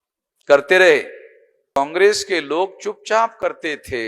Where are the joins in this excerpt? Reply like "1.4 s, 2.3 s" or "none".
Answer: 1.8 s